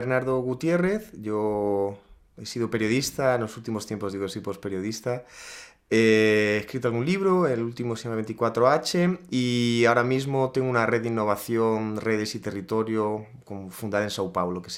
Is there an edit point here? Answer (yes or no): no